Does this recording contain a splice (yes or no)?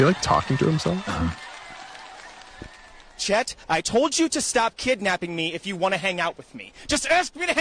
no